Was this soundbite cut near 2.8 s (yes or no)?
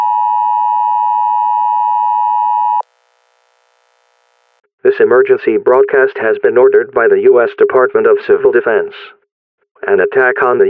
yes